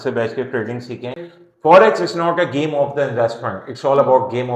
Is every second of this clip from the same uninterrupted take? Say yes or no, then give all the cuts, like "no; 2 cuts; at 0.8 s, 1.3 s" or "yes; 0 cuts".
no; 1 cut; at 1.2 s